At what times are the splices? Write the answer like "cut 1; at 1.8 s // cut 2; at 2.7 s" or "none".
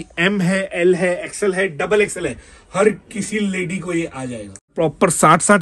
cut 1; at 4.7 s